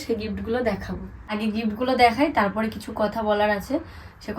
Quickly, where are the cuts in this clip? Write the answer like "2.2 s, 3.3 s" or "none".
1.3 s

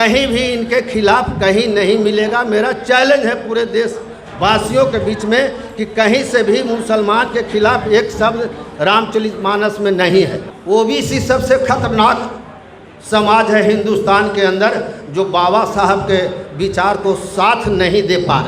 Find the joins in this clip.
10.5 s

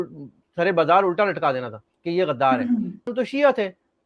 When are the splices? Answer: 3.1 s

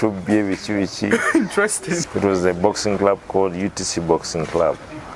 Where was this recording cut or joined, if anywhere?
2.1 s

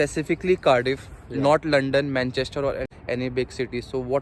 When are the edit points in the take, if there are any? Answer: 2.8 s

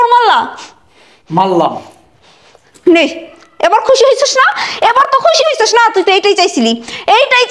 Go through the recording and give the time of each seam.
none

